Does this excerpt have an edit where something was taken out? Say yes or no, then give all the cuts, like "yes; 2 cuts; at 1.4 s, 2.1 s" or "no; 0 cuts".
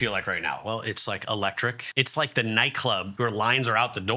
yes; 2 cuts; at 1.8 s, 3.1 s